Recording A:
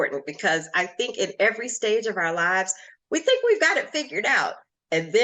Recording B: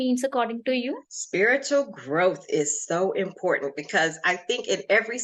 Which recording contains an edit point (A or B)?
B